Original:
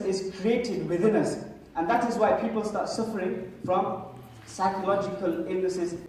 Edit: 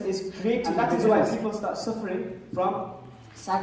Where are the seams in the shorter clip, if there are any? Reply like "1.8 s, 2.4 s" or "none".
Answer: 1.1 s